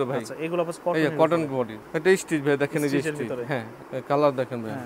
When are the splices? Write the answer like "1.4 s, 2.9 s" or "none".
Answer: 1.8 s, 3.7 s